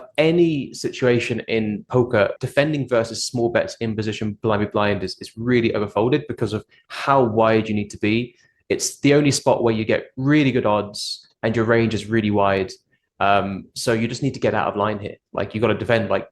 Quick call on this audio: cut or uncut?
cut